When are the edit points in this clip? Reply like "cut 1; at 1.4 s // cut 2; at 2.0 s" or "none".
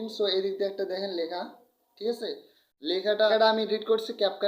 cut 1; at 3.3 s